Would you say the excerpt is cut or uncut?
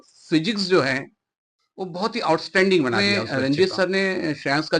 cut